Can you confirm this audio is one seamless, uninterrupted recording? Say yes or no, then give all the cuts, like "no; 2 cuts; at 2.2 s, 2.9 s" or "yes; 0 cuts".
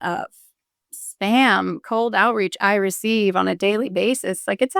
yes; 0 cuts